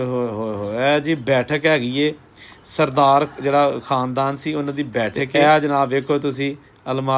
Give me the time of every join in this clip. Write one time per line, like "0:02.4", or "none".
0:05.2